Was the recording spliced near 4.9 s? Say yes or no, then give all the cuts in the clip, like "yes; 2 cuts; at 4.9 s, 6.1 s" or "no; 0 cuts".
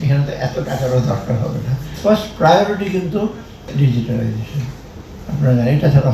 no; 2 cuts; at 1.9 s, 3.7 s